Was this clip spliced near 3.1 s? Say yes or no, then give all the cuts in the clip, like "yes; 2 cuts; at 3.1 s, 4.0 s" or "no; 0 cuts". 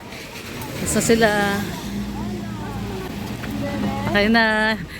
yes; 1 cut; at 3.1 s